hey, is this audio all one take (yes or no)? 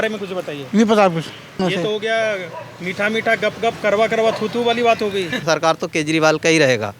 no